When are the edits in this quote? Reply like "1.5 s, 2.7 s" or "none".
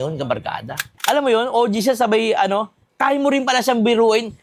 0.9 s